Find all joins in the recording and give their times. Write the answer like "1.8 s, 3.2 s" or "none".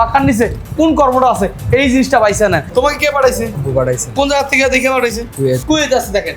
2.7 s, 3.6 s, 5.3 s